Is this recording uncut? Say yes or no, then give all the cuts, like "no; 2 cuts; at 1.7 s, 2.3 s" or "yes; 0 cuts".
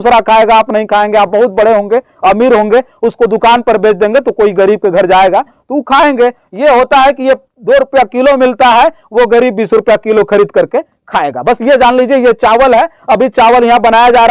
yes; 0 cuts